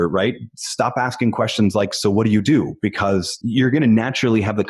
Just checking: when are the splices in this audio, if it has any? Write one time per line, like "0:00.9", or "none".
0:03.3